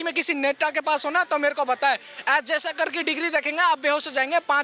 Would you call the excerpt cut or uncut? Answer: uncut